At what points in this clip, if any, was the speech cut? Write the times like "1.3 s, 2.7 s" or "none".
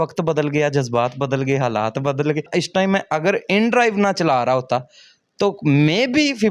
2.5 s

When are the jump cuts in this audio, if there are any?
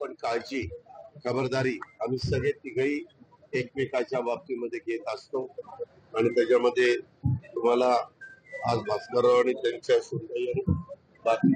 6.5 s

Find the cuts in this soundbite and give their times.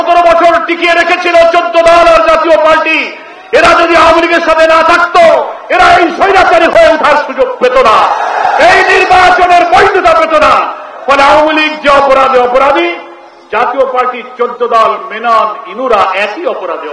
none

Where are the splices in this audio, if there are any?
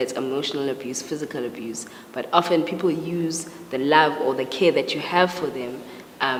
none

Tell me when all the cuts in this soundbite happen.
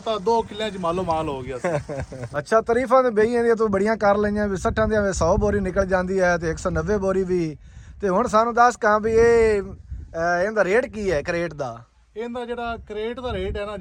none

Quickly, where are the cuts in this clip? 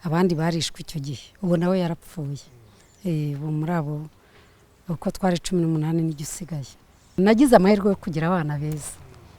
7.1 s

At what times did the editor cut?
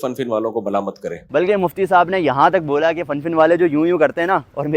1.1 s

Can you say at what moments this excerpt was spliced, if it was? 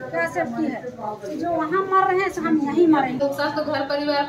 3.2 s

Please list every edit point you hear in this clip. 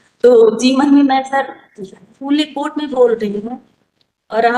none

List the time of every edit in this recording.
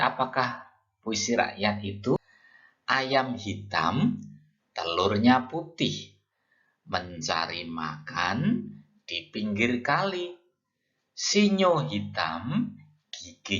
2.2 s

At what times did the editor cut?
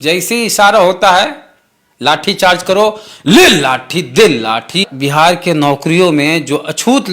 4.8 s

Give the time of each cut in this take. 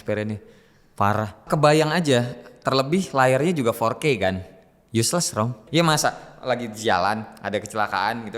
1.5 s, 5.6 s

